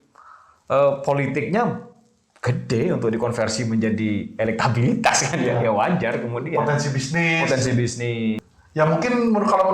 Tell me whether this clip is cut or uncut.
cut